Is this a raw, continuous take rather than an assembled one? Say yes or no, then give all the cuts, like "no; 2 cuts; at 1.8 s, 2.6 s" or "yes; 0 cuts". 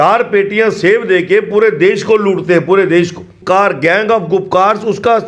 no; 1 cut; at 3.4 s